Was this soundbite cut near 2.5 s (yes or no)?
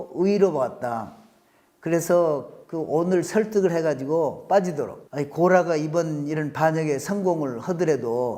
no